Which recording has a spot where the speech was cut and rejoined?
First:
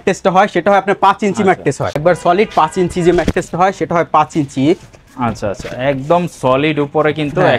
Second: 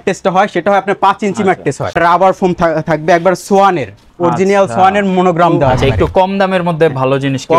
second; 2 cuts; at 2.0 s, 5.8 s

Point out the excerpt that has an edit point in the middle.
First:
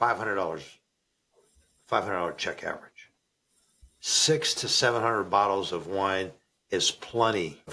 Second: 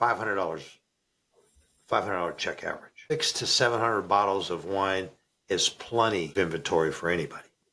second; 2 cuts; at 3.1 s, 6.3 s

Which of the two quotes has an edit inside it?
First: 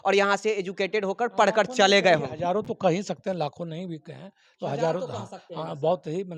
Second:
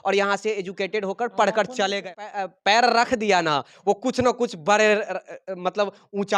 second; 1 cut; at 2.3 s

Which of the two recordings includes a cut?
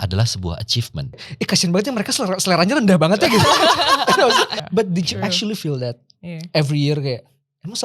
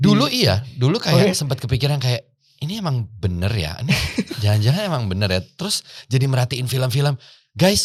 first; 2 cuts; at 1.3 s, 4.6 s

